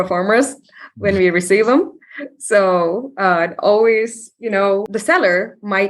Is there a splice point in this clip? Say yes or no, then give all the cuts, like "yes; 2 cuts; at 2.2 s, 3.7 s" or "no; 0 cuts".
yes; 1 cut; at 4.9 s